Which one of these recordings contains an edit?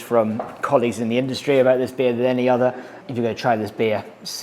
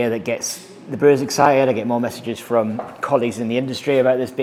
first; 1 cut; at 3.0 s

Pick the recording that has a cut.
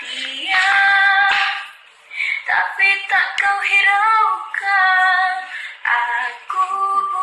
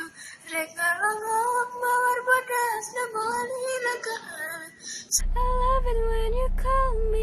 second; 1 cut; at 5.1 s

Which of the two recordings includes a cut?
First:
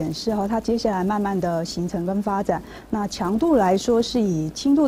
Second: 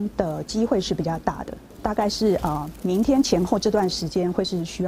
second; 1 cut; at 1.7 s

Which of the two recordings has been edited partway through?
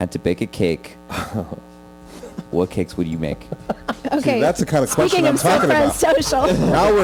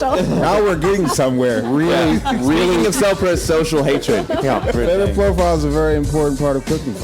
second; 1 cut; at 4.8 s

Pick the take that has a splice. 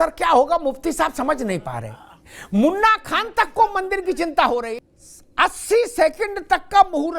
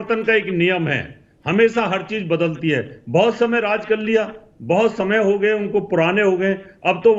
first; 1 cut; at 4.8 s

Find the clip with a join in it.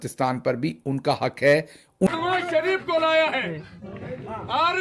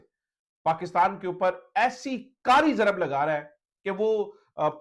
first; 1 cut; at 2.1 s

